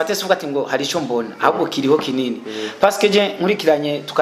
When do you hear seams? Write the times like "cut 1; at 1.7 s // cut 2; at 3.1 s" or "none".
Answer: none